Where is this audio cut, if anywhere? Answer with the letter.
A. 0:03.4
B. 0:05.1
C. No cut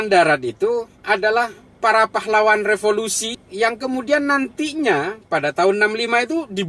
A